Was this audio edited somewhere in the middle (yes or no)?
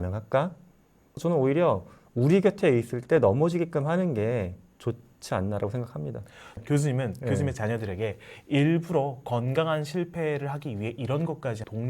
yes